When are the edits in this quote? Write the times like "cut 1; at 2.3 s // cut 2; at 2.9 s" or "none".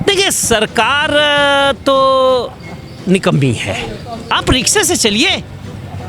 cut 1; at 4.3 s